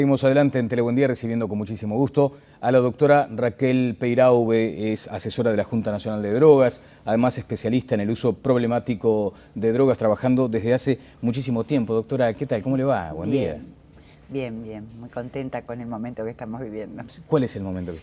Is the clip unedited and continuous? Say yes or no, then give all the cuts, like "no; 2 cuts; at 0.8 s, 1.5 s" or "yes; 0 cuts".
yes; 0 cuts